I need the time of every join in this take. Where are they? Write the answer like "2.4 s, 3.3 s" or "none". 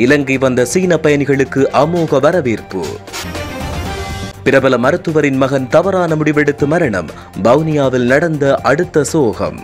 none